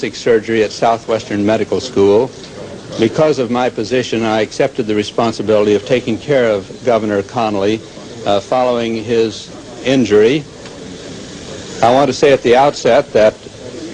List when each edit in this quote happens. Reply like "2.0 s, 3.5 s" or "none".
none